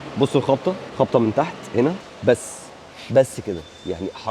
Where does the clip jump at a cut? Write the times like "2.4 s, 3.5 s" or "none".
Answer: 0.8 s, 2.1 s